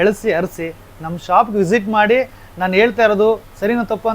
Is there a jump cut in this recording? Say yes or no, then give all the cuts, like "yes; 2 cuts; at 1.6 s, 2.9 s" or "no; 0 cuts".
no; 0 cuts